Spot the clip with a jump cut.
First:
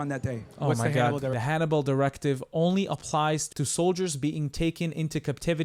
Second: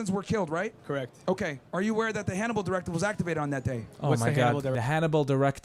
first; 1 cut; at 3.5 s

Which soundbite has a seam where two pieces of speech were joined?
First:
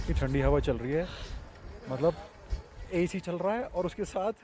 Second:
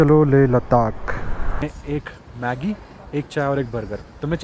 second; 1 cut; at 1.7 s

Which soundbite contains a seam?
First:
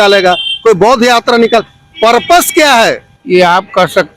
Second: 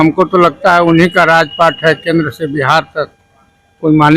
first; 1 cut; at 3.1 s

